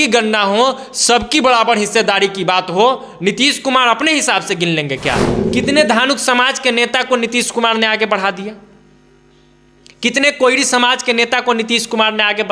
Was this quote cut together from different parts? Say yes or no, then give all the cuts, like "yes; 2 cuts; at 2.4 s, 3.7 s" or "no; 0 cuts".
yes; 1 cut; at 5.3 s